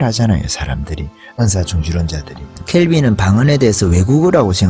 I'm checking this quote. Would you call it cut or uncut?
uncut